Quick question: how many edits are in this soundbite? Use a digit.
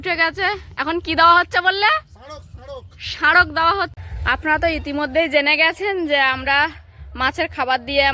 1